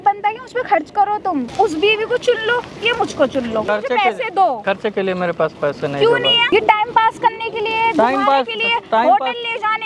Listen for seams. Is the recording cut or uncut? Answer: cut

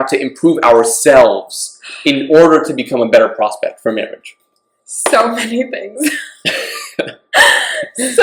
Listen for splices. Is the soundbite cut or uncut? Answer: uncut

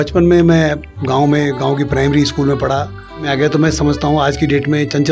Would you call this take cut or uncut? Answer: cut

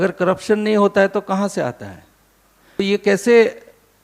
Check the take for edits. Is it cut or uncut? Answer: cut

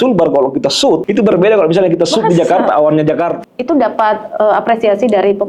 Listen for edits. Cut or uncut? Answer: cut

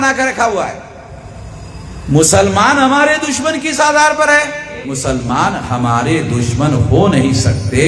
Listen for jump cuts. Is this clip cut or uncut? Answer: cut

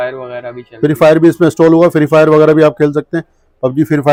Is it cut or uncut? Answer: uncut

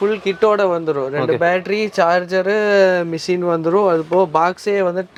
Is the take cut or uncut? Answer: uncut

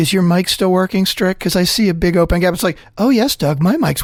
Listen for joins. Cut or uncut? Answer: uncut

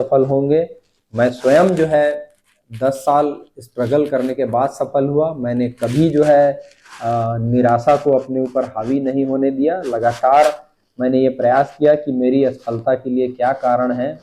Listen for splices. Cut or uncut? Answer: uncut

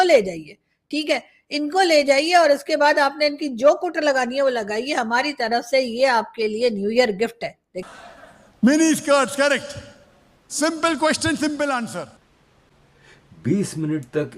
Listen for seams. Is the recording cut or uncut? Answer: cut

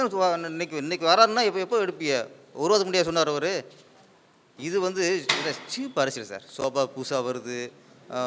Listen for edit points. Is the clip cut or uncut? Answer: uncut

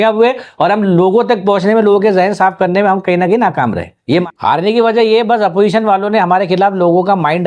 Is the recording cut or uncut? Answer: cut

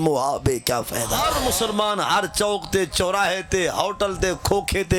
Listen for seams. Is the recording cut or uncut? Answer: cut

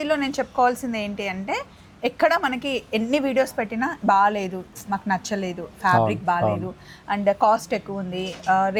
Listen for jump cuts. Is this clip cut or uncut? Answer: uncut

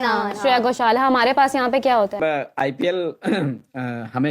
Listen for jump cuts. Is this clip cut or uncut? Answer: cut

